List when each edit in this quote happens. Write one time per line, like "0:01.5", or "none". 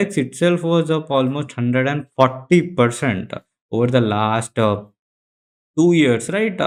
none